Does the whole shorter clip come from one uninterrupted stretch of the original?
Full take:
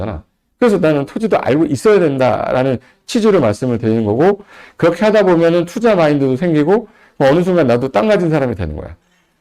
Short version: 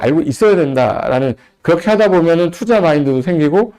no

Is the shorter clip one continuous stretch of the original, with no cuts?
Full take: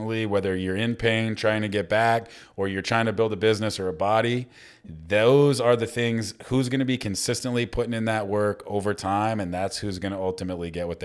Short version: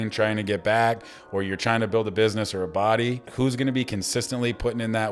no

